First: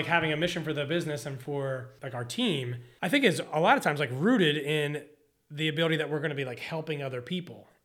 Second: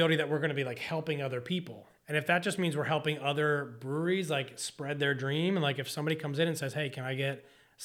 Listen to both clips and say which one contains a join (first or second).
first